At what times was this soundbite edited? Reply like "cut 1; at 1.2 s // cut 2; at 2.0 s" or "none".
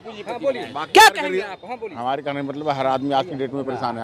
none